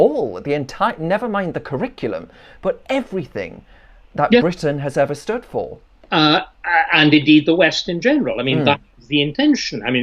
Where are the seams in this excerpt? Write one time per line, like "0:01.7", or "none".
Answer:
none